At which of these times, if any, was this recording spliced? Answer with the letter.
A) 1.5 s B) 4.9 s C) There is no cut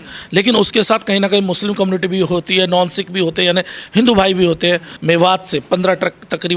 B